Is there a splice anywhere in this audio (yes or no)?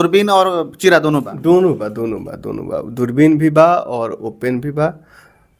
no